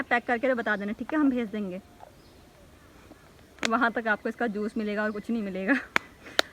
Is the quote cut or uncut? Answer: uncut